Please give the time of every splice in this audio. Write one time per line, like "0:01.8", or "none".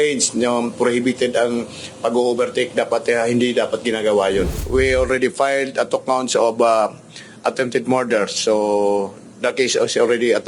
0:04.6